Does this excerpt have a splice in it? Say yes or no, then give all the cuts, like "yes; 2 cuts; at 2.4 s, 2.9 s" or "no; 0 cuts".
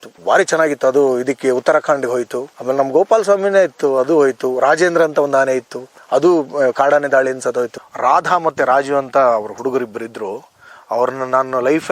yes; 1 cut; at 7.8 s